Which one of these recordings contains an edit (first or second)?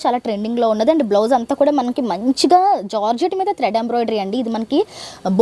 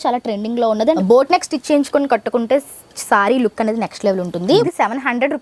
second